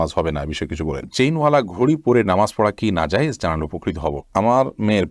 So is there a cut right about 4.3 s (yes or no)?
yes